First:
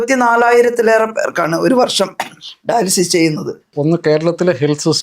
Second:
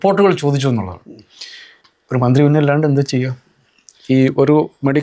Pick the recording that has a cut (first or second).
first